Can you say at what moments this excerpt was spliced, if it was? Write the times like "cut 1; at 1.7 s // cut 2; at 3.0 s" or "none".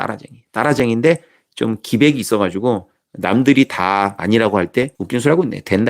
cut 1; at 4.2 s // cut 2; at 5.0 s

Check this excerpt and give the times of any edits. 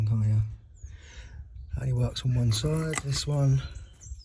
cut 1; at 3.0 s

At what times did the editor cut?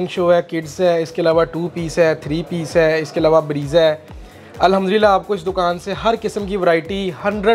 none

